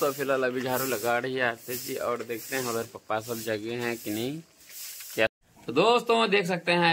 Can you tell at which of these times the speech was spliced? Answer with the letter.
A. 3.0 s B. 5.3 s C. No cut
B